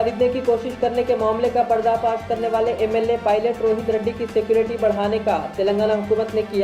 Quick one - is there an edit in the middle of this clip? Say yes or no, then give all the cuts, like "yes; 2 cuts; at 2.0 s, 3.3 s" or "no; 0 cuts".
no; 0 cuts